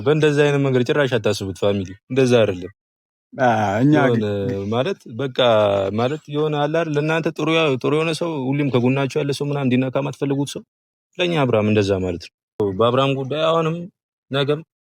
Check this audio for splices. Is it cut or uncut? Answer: cut